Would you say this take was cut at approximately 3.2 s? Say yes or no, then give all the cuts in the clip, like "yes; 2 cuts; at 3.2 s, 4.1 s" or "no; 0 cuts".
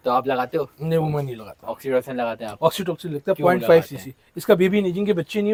no; 0 cuts